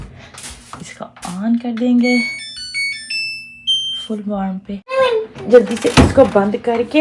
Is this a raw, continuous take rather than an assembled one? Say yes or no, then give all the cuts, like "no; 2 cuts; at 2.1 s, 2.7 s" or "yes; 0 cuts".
no; 1 cut; at 5.0 s